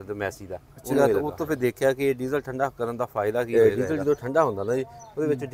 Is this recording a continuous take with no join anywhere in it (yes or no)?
no